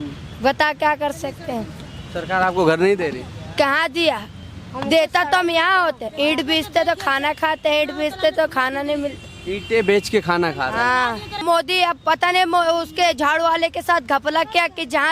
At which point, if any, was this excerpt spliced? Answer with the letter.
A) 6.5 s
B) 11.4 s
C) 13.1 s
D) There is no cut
B